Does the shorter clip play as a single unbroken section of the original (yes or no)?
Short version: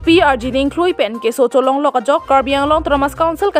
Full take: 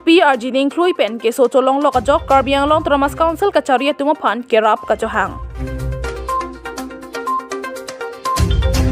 yes